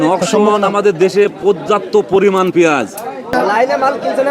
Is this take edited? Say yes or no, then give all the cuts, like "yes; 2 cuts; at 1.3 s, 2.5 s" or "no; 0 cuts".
yes; 1 cut; at 3.3 s